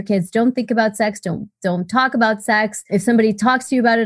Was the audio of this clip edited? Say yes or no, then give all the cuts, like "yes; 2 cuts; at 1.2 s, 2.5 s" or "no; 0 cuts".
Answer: yes; 1 cut; at 2.9 s